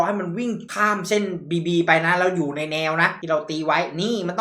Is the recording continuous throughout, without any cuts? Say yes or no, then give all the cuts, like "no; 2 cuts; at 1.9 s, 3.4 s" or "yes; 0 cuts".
no; 1 cut; at 3.2 s